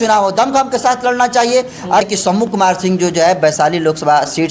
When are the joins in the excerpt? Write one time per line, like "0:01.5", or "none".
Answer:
0:02.0